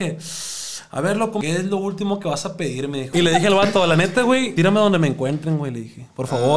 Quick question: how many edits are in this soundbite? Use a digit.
3